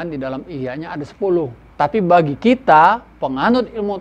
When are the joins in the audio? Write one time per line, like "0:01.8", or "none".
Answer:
0:01.6